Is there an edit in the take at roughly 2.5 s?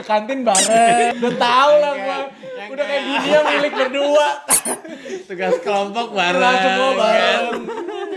no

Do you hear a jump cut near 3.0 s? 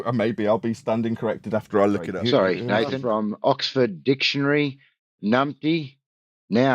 yes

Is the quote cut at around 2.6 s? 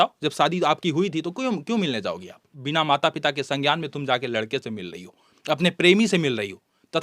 yes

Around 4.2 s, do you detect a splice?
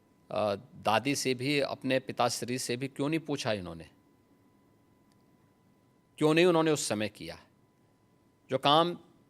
no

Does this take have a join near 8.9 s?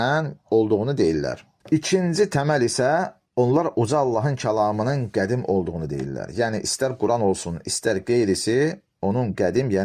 no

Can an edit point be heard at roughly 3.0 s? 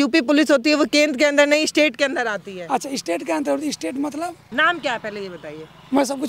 no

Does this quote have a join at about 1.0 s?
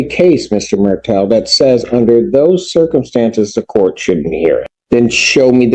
no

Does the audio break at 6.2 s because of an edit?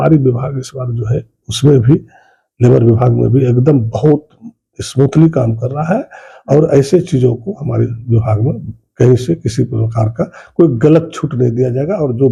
no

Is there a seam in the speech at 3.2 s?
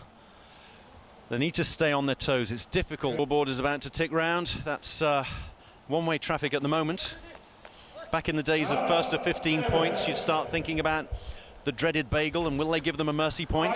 yes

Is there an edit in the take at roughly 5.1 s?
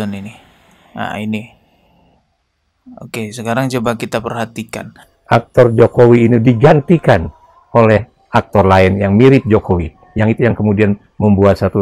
yes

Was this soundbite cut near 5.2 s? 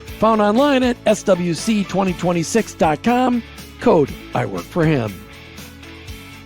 yes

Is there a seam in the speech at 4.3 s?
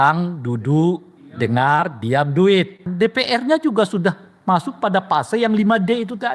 no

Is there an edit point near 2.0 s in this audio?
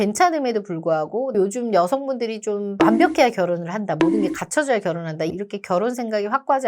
no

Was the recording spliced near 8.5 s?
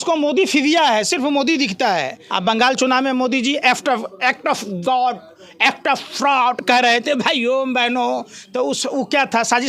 no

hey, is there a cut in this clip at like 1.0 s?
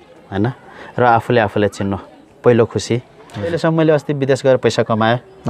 no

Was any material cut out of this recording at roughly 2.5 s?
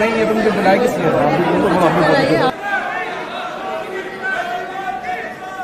yes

